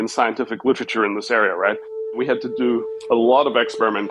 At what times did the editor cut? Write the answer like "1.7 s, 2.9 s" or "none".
2.0 s